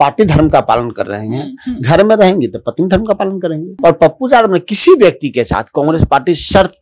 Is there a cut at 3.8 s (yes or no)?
yes